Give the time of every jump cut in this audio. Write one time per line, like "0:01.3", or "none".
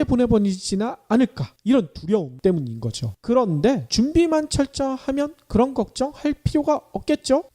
none